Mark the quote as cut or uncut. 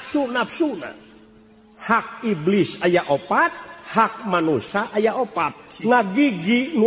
uncut